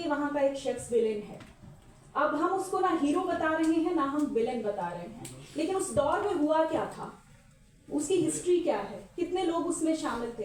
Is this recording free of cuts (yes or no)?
yes